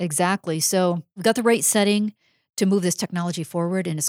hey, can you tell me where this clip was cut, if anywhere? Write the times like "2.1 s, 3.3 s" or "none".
1.1 s